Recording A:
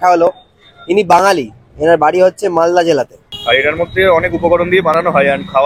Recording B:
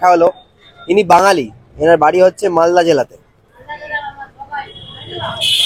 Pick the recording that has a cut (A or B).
A